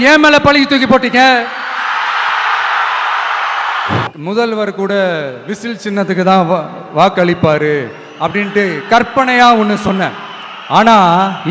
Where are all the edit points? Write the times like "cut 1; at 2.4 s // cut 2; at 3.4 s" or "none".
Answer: cut 1; at 4.1 s